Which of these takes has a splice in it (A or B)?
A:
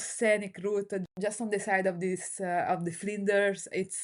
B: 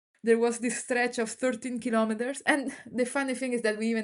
A